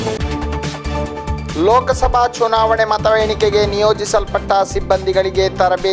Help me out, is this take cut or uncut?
cut